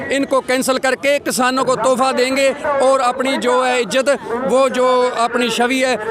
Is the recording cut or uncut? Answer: uncut